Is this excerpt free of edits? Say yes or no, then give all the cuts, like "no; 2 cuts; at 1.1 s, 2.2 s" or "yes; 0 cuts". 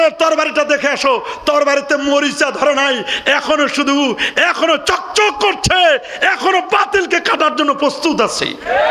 yes; 0 cuts